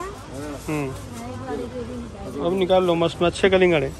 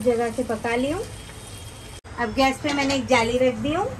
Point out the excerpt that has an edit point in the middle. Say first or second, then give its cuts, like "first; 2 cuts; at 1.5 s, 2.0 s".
second; 1 cut; at 2.0 s